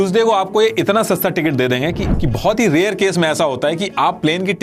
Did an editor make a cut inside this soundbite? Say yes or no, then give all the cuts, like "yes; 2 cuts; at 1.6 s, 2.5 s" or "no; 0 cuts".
yes; 1 cut; at 2.1 s